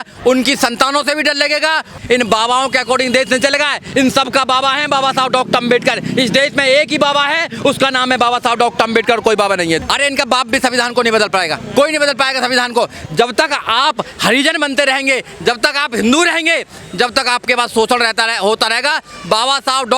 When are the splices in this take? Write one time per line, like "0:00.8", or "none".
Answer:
0:01.9
0:09.8
0:13.0